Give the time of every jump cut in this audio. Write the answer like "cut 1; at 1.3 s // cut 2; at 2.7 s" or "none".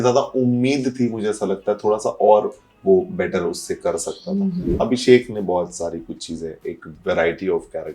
cut 1; at 4.7 s